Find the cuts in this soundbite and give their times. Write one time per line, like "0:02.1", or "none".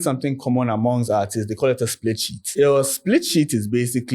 0:02.4